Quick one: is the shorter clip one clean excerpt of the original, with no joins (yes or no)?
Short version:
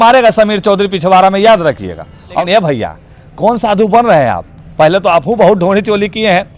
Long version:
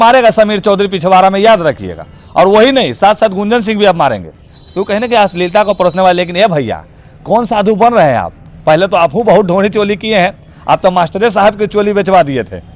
no